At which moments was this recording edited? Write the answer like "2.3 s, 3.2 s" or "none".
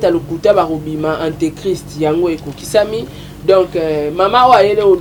none